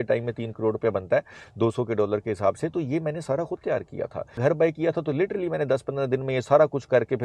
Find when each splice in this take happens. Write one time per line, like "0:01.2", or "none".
0:04.4